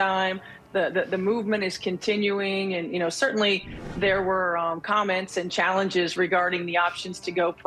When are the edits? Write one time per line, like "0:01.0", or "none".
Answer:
none